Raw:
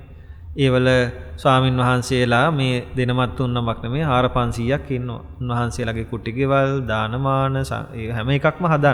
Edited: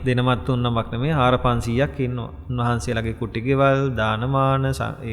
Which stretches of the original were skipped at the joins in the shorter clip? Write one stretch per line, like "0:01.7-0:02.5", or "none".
none